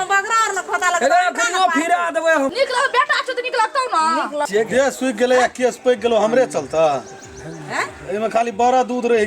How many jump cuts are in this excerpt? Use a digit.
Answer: 2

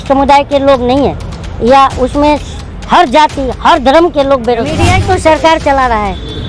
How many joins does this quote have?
1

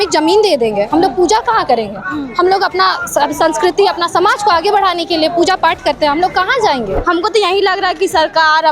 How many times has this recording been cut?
1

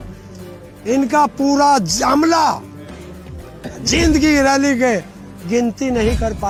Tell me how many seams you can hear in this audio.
0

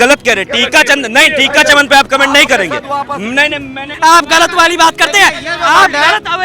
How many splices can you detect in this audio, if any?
1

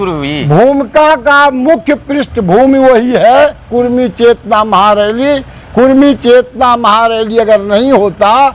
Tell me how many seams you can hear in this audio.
0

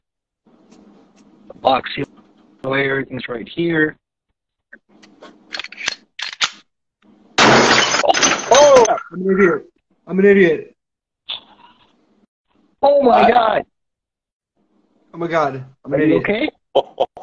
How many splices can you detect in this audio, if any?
1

